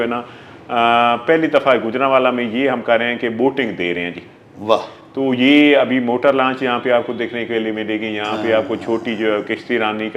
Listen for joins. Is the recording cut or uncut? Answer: uncut